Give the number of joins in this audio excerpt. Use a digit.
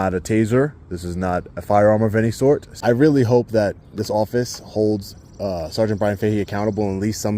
1